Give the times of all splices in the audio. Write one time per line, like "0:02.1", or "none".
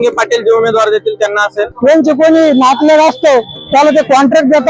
0:01.7